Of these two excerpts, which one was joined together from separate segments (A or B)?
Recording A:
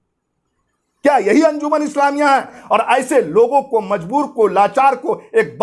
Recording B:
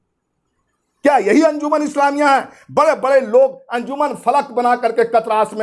A